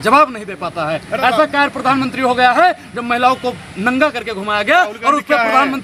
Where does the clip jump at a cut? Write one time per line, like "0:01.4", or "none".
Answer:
none